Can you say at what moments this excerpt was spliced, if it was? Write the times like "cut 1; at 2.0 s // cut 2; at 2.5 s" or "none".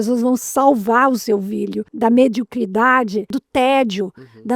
cut 1; at 1.9 s // cut 2; at 3.4 s